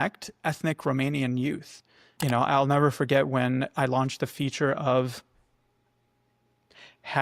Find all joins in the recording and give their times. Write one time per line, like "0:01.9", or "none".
0:02.1